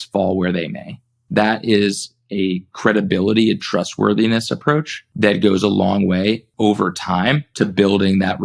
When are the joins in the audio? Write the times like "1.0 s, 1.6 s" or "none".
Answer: 5.0 s, 6.5 s, 7.5 s